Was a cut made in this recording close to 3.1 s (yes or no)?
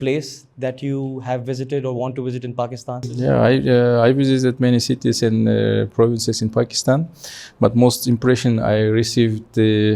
yes